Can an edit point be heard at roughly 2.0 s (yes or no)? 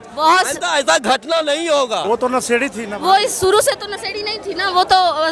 yes